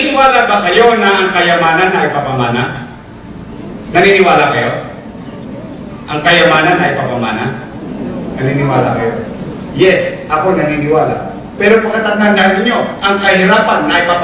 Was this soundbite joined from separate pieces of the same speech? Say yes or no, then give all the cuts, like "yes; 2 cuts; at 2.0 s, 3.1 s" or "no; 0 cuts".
no; 0 cuts